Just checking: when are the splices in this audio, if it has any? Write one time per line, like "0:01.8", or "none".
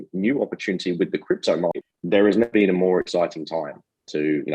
0:01.9